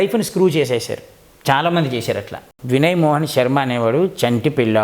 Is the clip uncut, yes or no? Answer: no